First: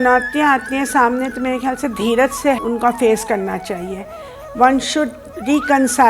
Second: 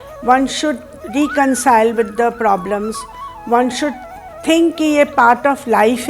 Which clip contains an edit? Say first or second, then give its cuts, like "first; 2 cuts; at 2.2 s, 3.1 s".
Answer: first; 1 cut; at 2.6 s